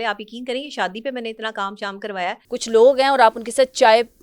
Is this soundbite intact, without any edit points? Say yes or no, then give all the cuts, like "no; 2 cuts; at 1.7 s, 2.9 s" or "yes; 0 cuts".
no; 1 cut; at 2.4 s